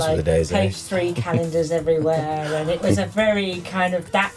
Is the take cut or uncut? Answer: uncut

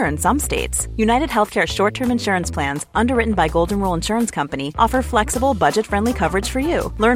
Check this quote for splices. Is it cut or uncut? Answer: uncut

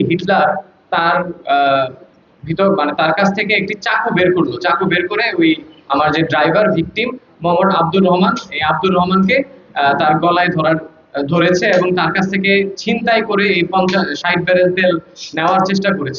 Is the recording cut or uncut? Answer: uncut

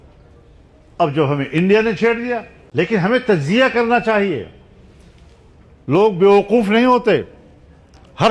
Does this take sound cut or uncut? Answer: cut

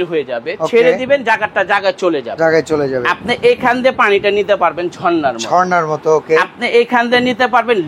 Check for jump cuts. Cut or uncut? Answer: uncut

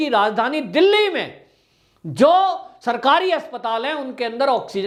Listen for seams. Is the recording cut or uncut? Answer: uncut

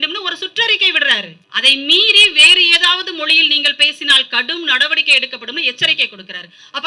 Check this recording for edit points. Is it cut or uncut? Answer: cut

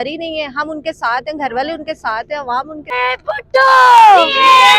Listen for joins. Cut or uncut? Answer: cut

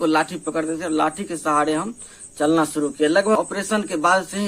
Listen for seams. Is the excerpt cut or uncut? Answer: cut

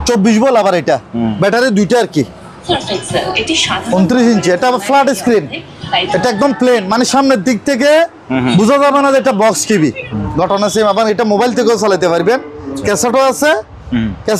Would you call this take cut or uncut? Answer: cut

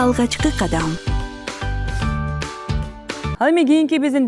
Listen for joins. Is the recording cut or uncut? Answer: cut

